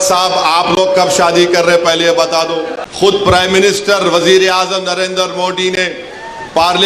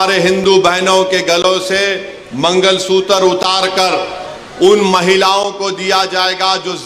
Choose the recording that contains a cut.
first; 1 cut; at 2.8 s

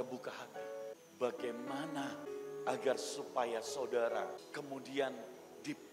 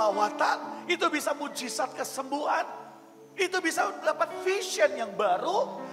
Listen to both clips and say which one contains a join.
first; 3 cuts; at 0.9 s, 2.2 s, 4.4 s

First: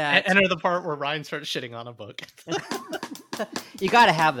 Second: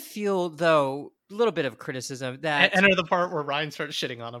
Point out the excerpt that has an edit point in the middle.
second; 1 cut; at 1.2 s

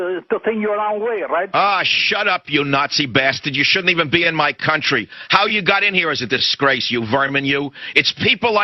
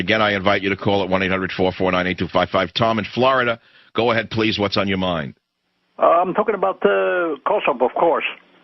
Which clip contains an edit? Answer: second; 1 cut; at 2.0 s

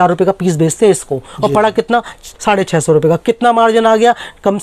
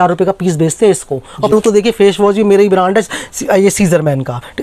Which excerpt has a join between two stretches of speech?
second; 1 cut; at 1.5 s

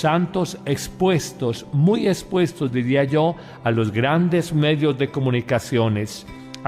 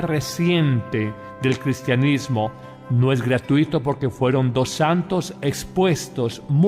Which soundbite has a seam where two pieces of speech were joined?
second; 1 cut; at 1.4 s

